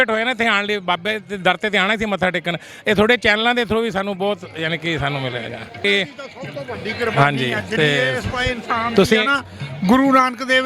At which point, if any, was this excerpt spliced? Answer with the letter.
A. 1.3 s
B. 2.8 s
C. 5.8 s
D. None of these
C